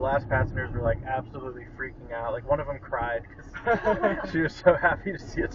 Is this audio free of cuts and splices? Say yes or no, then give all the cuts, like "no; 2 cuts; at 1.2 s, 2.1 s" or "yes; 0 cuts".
yes; 0 cuts